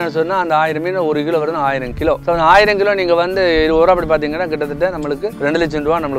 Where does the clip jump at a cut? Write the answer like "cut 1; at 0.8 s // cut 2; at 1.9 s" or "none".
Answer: cut 1; at 2.2 s // cut 2; at 5.4 s